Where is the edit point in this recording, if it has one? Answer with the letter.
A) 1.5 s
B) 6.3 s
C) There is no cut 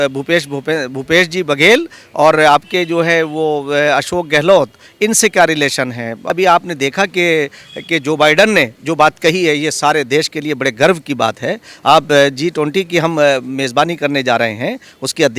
B